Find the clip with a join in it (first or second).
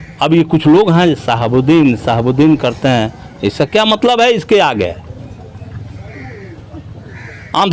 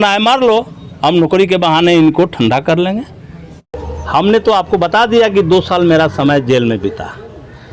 second